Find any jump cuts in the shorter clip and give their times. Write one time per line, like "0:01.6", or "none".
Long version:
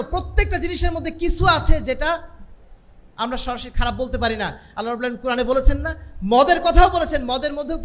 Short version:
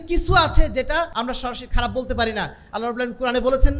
0:01.1